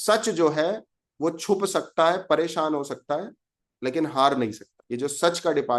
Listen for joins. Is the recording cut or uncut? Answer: uncut